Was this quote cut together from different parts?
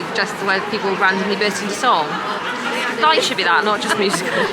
no; 0 cuts

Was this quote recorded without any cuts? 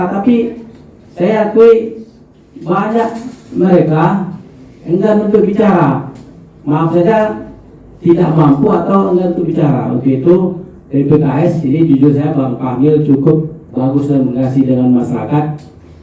yes; 0 cuts

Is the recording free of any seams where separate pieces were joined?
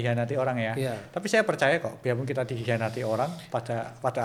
yes; 0 cuts

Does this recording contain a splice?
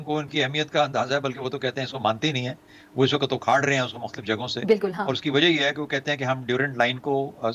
no; 0 cuts

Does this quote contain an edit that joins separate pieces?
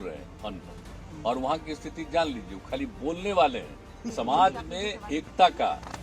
yes; 1 cut; at 4.1 s

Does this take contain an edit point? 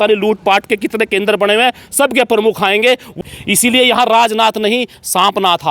yes; 1 cut; at 3.2 s

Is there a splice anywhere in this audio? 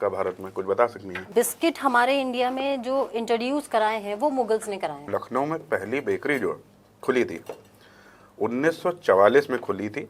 yes; 2 cuts; at 1.2 s, 5.1 s

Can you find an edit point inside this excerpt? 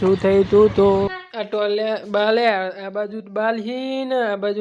yes; 1 cut; at 1.1 s

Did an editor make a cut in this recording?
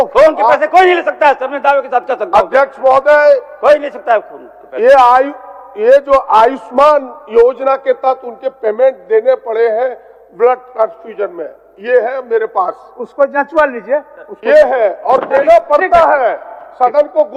no; 0 cuts

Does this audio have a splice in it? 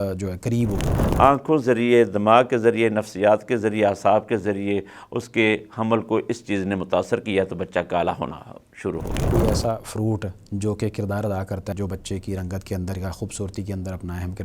yes; 2 cuts; at 1.0 s, 9.3 s

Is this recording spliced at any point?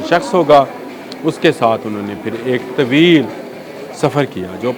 no; 0 cuts

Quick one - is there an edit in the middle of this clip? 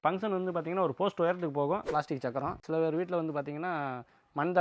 yes; 1 cut; at 1.9 s

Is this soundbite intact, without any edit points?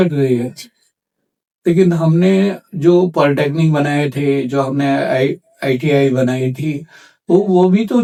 yes; 0 cuts

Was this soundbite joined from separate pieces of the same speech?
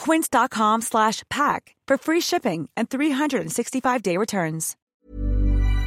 yes; 1 cut; at 4.9 s

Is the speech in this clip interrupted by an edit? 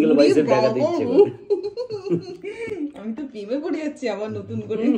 no; 0 cuts

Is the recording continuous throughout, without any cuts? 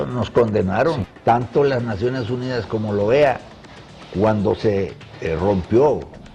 no; 1 cut; at 1.2 s

